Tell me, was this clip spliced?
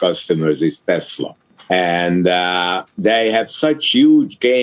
yes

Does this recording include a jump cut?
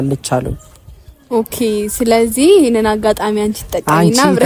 no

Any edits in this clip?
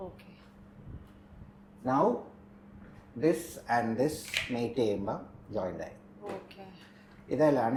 no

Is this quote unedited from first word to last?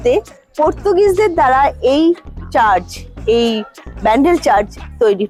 yes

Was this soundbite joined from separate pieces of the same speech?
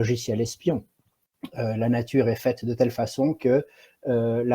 yes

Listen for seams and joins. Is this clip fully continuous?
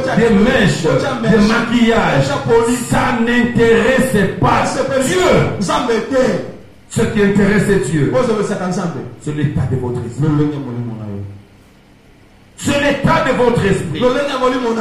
yes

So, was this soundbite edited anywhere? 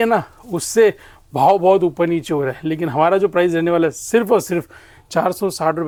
no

